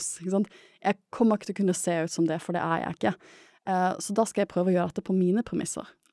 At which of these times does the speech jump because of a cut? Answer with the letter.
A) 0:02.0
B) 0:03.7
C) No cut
C